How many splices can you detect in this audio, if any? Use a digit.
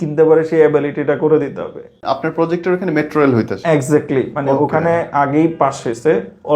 1